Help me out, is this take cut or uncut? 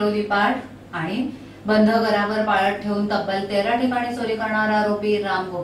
uncut